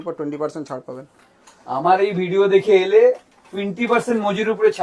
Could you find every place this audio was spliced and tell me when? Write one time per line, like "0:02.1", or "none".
none